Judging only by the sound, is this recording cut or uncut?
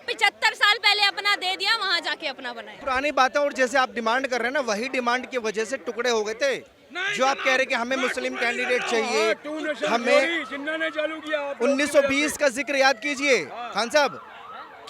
uncut